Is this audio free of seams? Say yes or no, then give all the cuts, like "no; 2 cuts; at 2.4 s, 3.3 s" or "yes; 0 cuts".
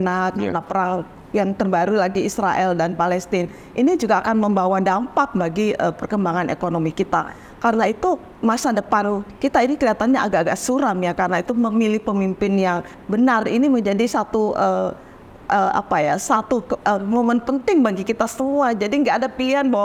yes; 0 cuts